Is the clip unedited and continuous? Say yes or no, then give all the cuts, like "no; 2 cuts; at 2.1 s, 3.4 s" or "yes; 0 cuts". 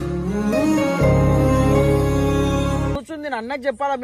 no; 1 cut; at 3.0 s